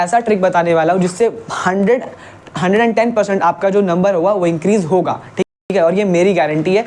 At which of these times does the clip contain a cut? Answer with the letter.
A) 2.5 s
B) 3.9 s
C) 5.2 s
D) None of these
D